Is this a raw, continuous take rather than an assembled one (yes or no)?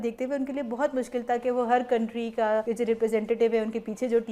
no